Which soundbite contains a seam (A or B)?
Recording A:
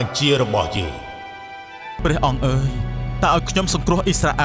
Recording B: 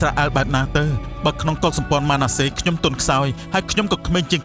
A